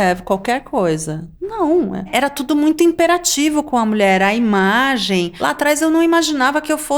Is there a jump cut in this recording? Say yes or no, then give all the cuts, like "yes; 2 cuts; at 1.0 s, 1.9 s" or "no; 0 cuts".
yes; 2 cuts; at 2.1 s, 5.3 s